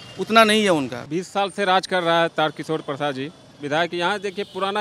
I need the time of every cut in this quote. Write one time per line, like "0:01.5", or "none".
0:01.0